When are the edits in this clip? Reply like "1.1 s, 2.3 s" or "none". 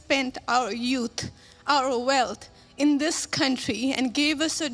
none